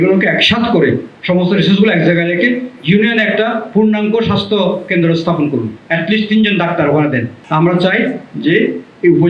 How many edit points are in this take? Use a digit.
1